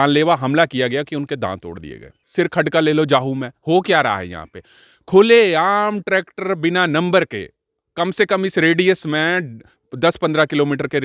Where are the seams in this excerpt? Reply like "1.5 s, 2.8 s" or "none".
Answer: 2.2 s

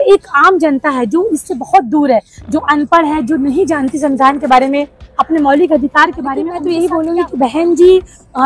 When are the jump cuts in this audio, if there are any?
6.5 s

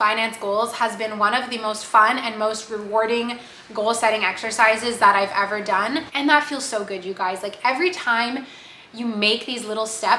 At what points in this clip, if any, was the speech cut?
6.1 s

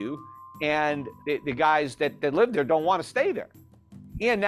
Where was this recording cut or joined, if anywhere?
1.1 s

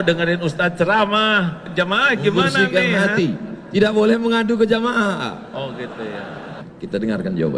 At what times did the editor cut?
1.6 s, 6.7 s

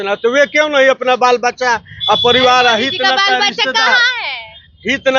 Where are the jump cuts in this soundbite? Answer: none

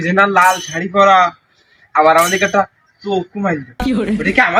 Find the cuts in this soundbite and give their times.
none

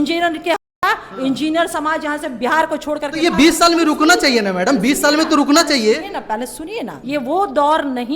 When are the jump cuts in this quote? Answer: 7.0 s

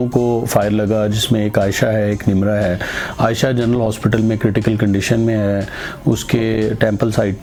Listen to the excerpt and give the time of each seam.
none

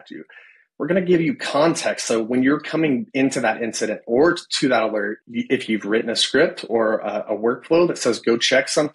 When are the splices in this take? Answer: 5.2 s

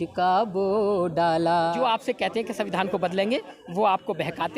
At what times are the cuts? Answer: 1.8 s

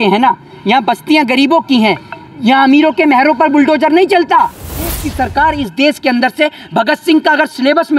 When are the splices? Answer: 4.7 s

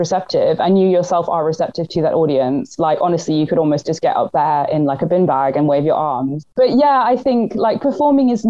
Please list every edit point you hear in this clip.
6.4 s

